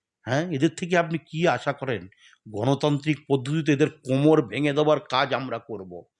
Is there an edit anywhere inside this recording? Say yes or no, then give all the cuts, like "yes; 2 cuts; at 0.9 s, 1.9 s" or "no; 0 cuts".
no; 0 cuts